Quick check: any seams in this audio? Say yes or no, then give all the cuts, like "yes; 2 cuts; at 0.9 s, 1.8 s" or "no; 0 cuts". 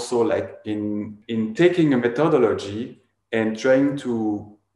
yes; 1 cut; at 1.2 s